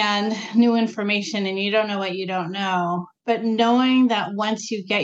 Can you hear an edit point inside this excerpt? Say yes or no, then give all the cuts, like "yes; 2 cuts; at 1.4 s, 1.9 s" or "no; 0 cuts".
no; 0 cuts